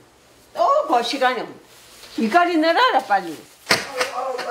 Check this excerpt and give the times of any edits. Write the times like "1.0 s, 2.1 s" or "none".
none